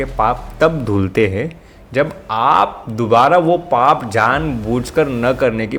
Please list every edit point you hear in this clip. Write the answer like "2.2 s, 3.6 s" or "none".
none